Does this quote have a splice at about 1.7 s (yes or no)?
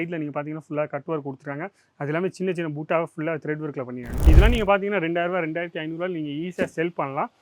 no